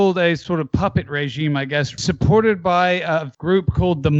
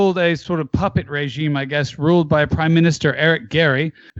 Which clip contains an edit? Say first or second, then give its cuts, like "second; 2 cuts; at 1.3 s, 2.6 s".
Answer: first; 2 cuts; at 2.0 s, 3.3 s